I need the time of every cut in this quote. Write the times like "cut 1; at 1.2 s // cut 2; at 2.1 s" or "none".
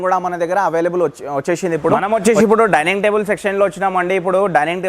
cut 1; at 2.0 s